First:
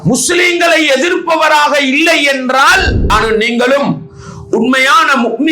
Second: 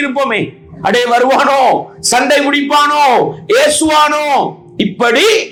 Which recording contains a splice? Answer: first; 1 cut; at 3.1 s

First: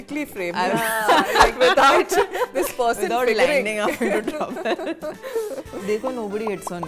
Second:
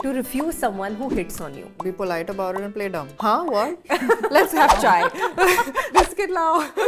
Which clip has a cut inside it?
second; 4 cuts; at 1.8 s, 3.1 s, 3.8 s, 5.8 s

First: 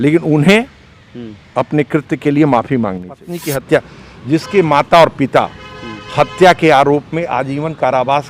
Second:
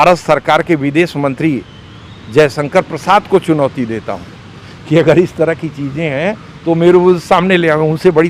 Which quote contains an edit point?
first; 1 cut; at 3.4 s

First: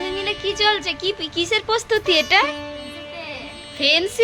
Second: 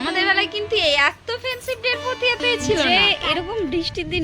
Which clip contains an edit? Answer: second; 1 cut; at 2.9 s

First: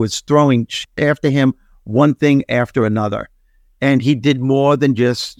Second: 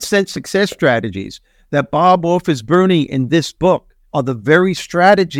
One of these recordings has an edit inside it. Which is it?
second; 1 cut; at 4.0 s

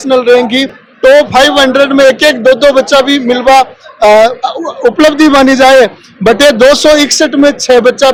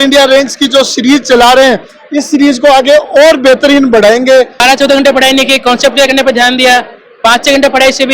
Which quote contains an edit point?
second; 1 cut; at 4.6 s

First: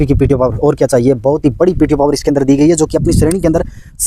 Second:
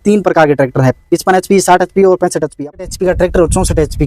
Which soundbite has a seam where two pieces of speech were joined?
second; 1 cut; at 2.5 s

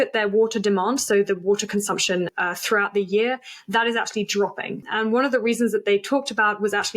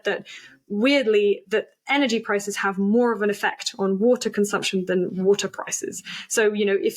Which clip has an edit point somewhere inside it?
first; 2 cuts; at 2.3 s, 4.8 s

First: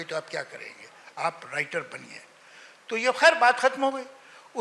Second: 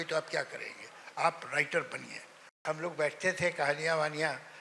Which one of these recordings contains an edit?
second; 1 cut; at 2.6 s

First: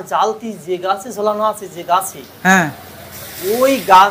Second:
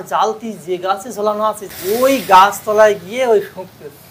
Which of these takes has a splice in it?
second; 1 cut; at 1.7 s

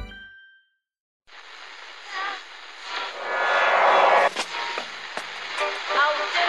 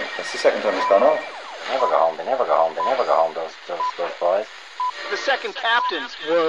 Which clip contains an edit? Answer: first; 1 cut; at 1.0 s

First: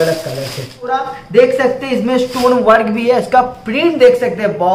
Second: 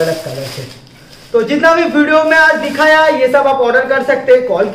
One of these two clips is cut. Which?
first; 1 cut; at 1.1 s

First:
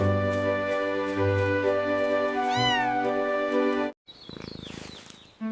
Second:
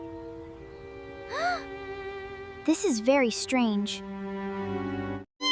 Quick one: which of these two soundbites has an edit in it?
first; 1 cut; at 4.1 s

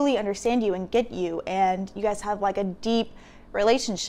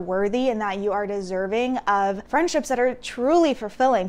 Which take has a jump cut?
second; 1 cut; at 2.2 s

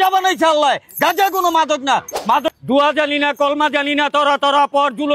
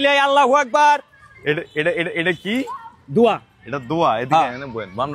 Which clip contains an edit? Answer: first; 1 cut; at 2.5 s

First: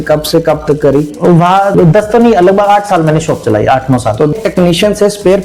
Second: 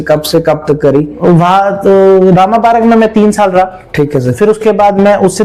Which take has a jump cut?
first; 2 cuts; at 1.7 s, 4.3 s

